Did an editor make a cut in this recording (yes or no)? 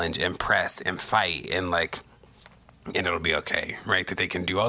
no